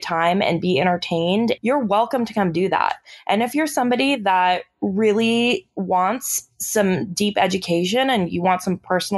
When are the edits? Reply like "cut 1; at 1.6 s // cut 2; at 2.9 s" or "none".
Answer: cut 1; at 1.6 s

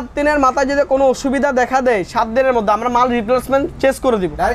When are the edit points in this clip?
none

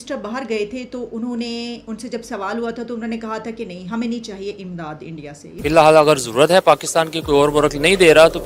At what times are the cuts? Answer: cut 1; at 5.5 s

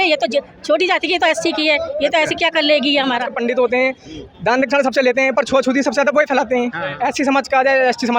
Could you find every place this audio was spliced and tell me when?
cut 1; at 3.3 s // cut 2; at 6.9 s

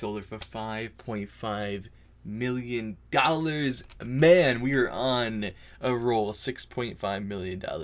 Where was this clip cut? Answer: none

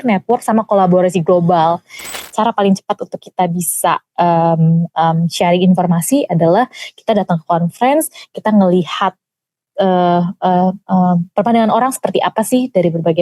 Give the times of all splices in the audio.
cut 1; at 2.1 s

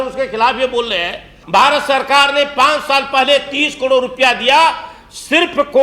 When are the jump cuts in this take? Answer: cut 1; at 1.4 s

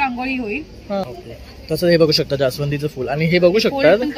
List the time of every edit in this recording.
cut 1; at 1.0 s

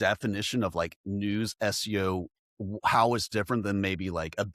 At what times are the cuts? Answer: none

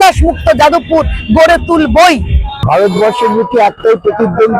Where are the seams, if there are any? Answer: cut 1; at 2.6 s

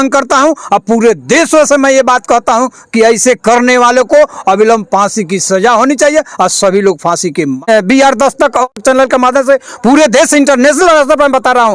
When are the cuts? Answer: cut 1; at 7.6 s // cut 2; at 8.7 s

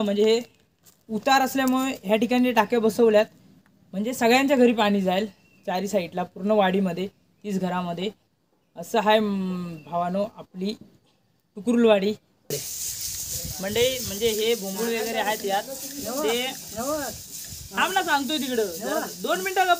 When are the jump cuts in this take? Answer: cut 1; at 12.6 s

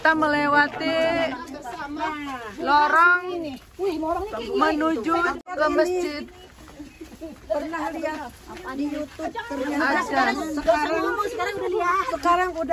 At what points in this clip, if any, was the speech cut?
cut 1; at 5.5 s

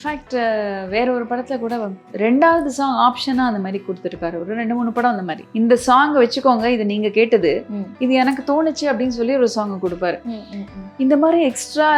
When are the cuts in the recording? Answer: none

